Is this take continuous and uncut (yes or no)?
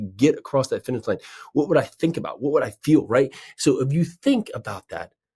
yes